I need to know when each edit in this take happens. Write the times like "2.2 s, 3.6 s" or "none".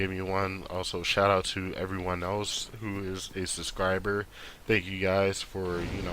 2.6 s

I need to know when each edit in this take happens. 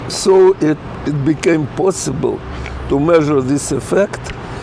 0.9 s

